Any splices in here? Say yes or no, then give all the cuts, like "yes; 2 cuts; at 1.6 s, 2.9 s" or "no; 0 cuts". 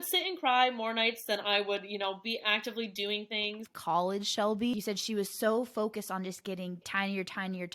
yes; 3 cuts; at 3.7 s, 4.7 s, 6.9 s